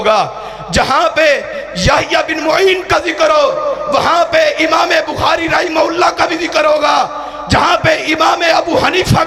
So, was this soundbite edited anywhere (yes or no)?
no